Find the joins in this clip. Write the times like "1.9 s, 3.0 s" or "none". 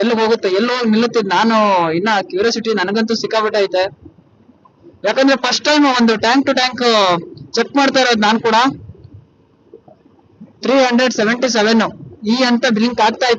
none